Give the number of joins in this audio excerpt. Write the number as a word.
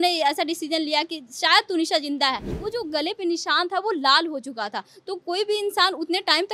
one